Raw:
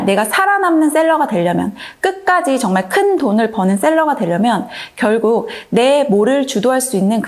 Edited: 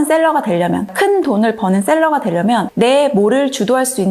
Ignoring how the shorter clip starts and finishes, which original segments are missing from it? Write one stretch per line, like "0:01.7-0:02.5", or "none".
0:01.8-0:02.9
0:04.6-0:05.6